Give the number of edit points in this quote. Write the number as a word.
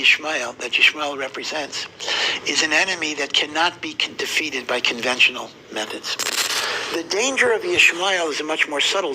one